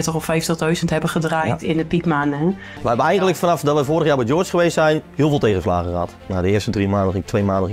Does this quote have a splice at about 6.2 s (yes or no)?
yes